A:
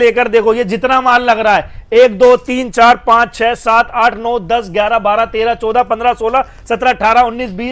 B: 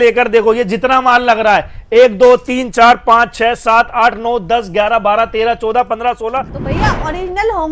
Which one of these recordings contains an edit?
B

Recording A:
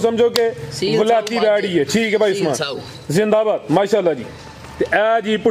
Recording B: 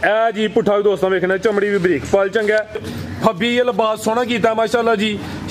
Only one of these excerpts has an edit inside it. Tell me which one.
B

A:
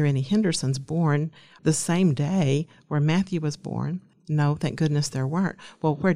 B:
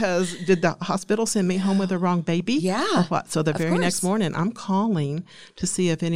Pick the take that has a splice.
A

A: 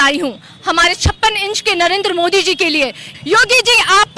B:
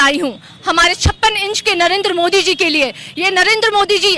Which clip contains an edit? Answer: A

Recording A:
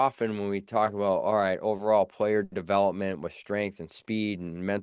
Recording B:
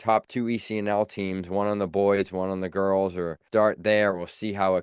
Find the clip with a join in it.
B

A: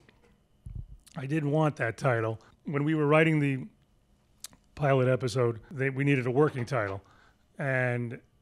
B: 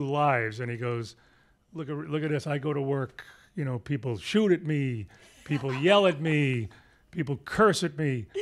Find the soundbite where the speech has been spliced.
A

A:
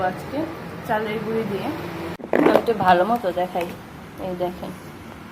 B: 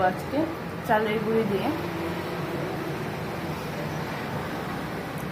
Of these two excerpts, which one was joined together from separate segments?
A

